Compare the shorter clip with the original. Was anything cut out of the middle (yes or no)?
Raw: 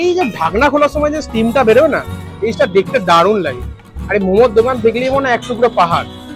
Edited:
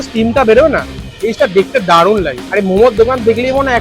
yes